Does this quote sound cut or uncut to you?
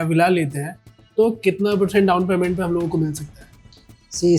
uncut